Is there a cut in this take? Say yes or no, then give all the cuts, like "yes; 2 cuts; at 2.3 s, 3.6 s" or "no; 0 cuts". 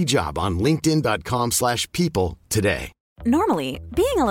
yes; 1 cut; at 2.9 s